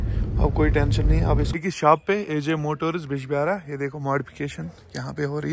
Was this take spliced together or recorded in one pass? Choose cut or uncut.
cut